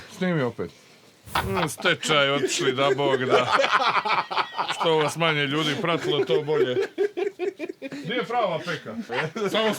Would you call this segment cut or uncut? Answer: cut